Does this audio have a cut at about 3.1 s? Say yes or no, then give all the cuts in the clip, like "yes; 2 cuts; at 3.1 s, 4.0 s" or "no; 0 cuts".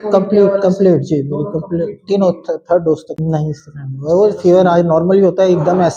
yes; 1 cut; at 3.1 s